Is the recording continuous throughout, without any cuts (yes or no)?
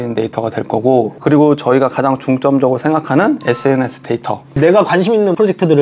no